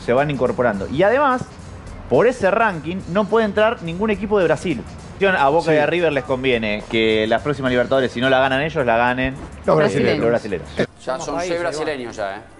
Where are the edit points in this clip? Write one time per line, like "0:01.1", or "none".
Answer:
0:05.2
0:10.8